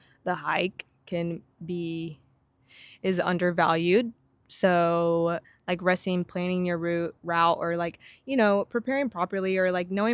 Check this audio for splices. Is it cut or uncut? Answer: cut